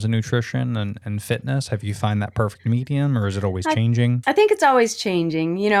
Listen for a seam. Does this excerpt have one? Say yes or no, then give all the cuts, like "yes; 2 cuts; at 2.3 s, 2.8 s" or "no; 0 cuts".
no; 0 cuts